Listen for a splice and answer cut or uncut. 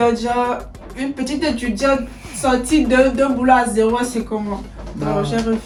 uncut